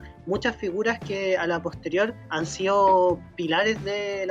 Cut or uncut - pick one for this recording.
cut